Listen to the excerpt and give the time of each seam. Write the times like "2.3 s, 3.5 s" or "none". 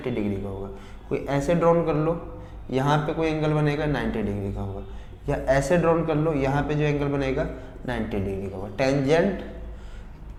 none